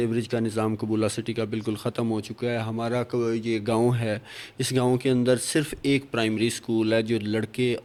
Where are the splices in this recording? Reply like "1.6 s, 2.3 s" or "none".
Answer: none